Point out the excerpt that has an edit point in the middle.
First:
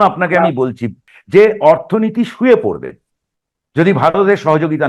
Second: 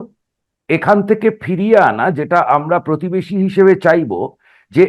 first; 1 cut; at 1.0 s

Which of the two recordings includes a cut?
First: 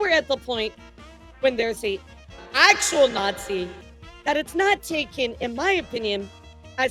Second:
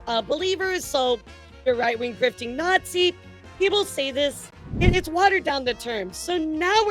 second; 1 cut; at 4.6 s

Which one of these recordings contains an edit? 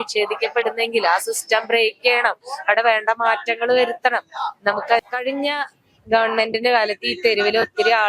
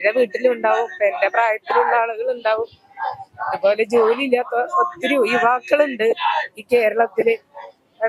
first; 1 cut; at 5.1 s

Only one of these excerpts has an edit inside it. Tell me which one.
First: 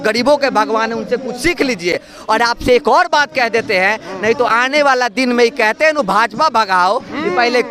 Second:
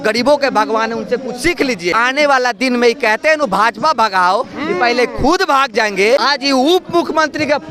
second; 2 cuts; at 1.9 s, 6.2 s

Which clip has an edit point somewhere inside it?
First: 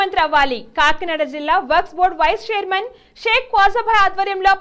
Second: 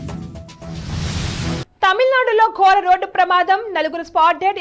second; 1 cut; at 1.7 s

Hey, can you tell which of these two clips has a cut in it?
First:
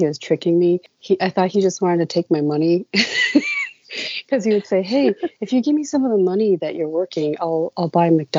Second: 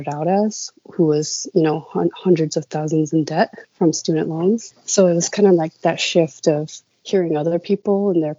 first; 1 cut; at 0.9 s

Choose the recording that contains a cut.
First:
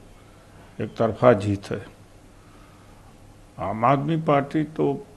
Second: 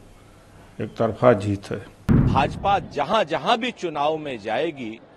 second; 1 cut; at 2.3 s

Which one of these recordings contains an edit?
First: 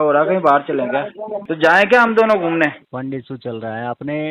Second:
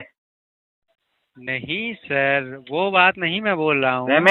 first; 2 cuts; at 1.5 s, 2.8 s

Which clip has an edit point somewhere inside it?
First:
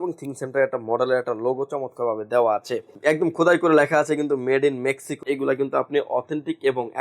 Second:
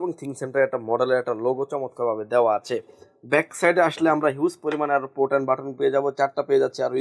first; 2 cuts; at 2.9 s, 5.2 s

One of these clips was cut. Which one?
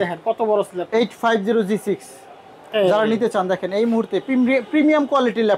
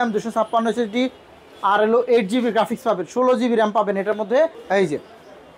second; 1 cut; at 4.6 s

